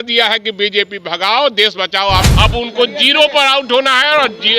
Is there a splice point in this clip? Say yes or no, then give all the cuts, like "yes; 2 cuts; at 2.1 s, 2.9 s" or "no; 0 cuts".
yes; 1 cut; at 2.3 s